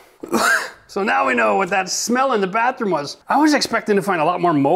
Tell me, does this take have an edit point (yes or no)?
yes